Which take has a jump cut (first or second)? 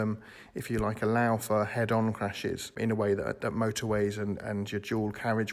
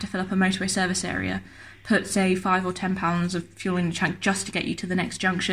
first